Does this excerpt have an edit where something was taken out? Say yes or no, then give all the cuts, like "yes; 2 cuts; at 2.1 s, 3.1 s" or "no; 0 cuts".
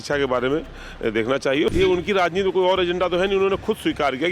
yes; 1 cut; at 1.7 s